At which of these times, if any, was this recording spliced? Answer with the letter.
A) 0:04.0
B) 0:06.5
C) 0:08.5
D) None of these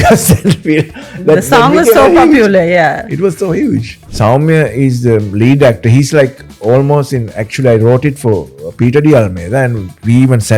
A